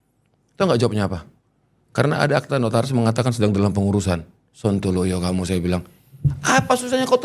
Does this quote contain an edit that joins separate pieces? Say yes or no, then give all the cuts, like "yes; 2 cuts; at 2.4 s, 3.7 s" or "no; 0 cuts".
no; 0 cuts